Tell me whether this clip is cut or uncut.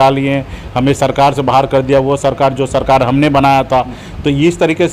uncut